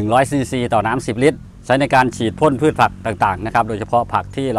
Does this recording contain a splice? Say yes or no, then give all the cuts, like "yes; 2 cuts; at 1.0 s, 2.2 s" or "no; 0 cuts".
no; 0 cuts